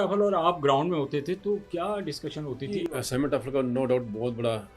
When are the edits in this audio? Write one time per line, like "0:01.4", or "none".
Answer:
0:02.9